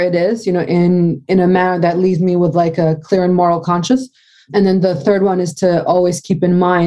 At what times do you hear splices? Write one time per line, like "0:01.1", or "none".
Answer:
none